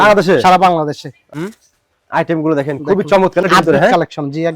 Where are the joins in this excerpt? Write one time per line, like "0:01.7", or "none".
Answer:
0:01.3
0:03.4